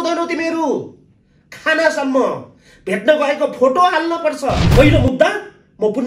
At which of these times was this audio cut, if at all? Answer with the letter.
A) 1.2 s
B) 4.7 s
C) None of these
B